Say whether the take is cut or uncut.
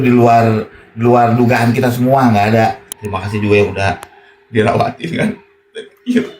cut